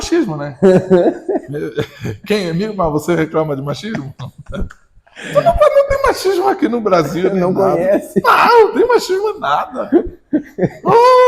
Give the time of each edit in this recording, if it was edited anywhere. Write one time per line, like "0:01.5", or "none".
none